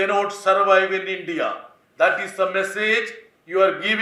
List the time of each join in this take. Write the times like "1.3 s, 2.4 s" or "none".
none

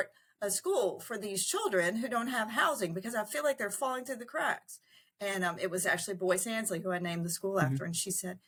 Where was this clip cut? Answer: none

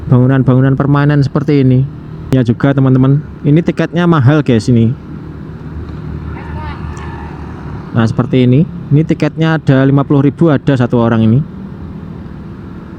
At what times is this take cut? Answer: 2.3 s

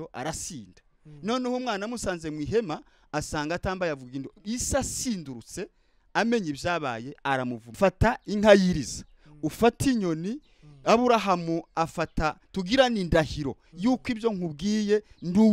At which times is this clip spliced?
7.6 s

